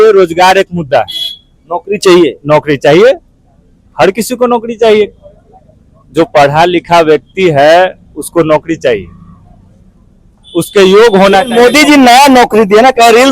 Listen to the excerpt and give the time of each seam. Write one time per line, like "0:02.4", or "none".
none

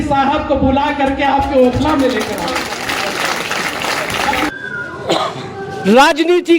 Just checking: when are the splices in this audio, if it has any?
0:04.5

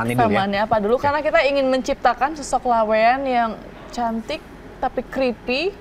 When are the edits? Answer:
none

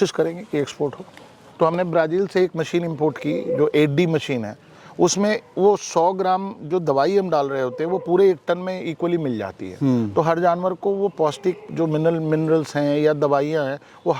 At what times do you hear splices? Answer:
0:01.4

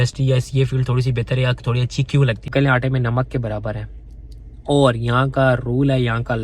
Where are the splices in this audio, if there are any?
0:02.5

